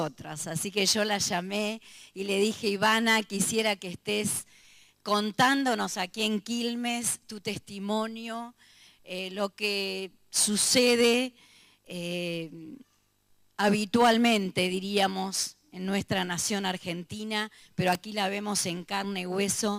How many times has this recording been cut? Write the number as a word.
zero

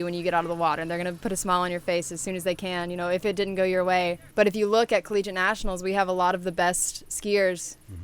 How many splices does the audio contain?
one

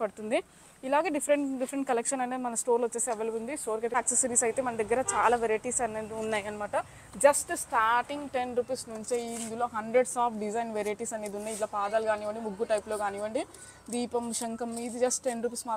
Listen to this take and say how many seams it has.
one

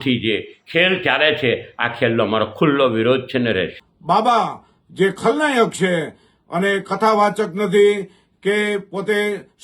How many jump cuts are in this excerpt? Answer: one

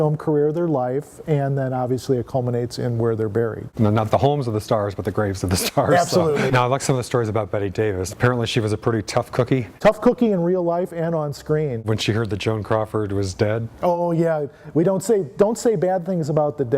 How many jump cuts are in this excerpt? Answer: four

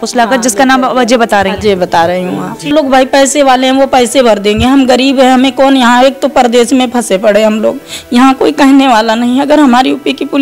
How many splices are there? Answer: one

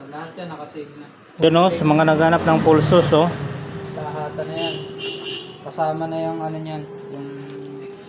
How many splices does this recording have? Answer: one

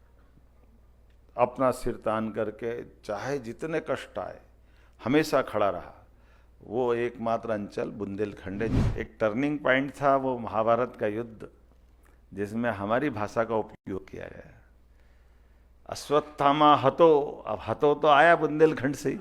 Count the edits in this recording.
one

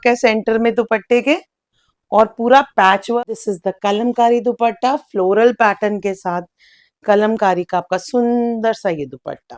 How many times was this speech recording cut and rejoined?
one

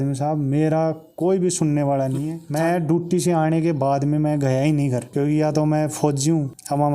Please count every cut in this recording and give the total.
two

